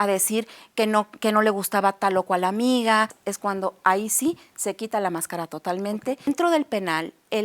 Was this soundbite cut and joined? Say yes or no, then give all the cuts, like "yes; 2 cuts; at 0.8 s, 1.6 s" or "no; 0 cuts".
yes; 2 cuts; at 3.2 s, 6.3 s